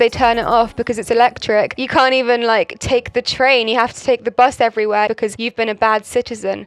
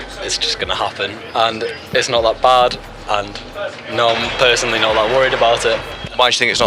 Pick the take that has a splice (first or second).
first